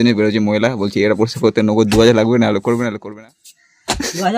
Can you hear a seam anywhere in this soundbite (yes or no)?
yes